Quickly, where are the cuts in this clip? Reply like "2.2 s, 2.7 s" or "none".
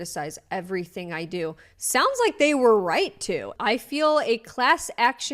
3.5 s